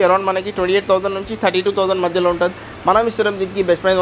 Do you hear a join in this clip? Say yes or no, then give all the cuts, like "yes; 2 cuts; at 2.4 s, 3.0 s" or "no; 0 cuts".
no; 0 cuts